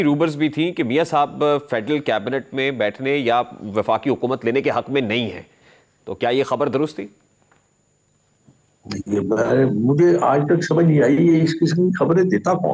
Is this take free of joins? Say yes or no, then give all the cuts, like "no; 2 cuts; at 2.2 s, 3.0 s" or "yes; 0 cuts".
yes; 0 cuts